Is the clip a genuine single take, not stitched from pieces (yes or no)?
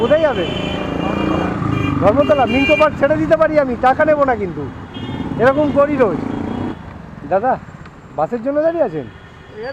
no